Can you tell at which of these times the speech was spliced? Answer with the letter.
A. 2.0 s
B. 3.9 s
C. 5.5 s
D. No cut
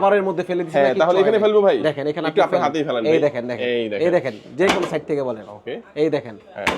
D